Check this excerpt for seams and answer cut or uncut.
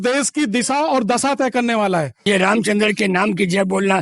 cut